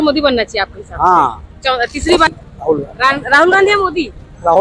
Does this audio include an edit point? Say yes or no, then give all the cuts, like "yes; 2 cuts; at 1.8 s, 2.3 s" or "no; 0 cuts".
yes; 1 cut; at 2.4 s